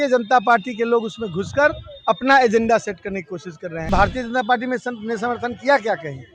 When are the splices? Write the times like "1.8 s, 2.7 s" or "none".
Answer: 3.9 s